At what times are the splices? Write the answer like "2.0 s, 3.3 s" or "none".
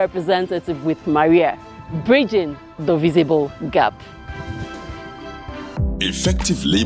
5.7 s